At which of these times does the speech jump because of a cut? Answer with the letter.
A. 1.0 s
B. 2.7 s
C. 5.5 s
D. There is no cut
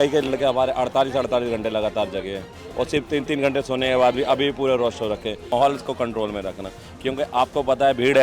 C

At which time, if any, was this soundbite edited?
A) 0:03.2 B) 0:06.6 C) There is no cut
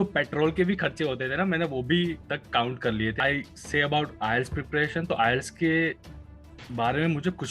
A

